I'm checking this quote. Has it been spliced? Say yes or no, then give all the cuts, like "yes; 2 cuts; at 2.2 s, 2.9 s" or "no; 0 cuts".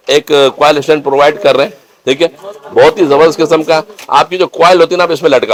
no; 0 cuts